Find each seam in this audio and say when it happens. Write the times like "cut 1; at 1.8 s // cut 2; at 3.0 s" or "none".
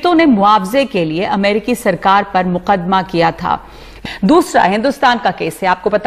cut 1; at 3.9 s